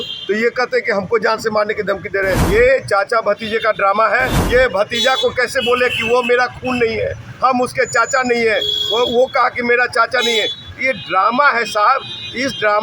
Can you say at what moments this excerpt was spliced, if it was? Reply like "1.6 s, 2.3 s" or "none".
2.4 s, 4.4 s